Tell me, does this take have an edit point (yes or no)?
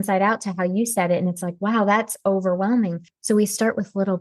yes